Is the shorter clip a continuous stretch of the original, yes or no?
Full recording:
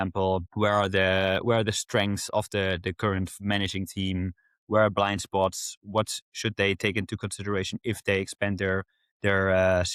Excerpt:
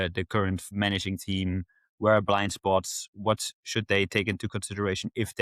yes